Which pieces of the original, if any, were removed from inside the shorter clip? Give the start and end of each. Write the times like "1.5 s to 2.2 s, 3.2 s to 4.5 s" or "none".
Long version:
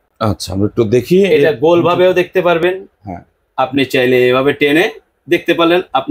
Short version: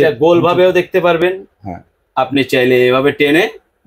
none